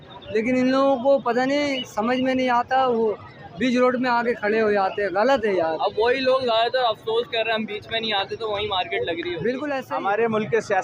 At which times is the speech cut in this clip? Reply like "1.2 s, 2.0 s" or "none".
9.8 s